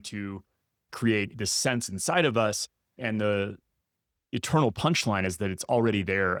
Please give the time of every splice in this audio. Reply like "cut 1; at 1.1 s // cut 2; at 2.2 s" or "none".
none